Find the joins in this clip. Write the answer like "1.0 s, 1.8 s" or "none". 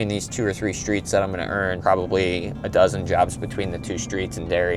none